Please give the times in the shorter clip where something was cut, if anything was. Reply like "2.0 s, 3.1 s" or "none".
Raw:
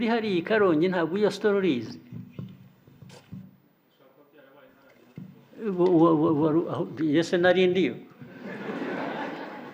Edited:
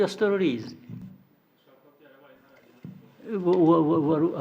1.0 s